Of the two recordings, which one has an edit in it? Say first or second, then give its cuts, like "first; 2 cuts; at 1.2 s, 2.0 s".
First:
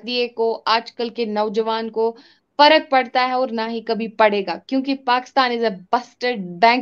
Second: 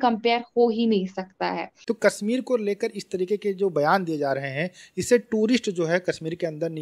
second; 1 cut; at 1.7 s